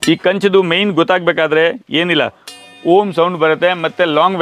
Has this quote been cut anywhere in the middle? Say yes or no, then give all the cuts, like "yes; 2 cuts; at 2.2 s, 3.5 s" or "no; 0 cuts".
no; 0 cuts